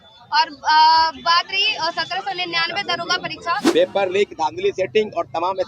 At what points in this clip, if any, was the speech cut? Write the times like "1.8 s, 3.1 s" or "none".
3.6 s